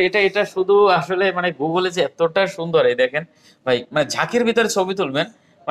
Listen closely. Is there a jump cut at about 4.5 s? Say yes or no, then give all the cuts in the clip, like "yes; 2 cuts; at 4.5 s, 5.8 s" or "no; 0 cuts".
no; 0 cuts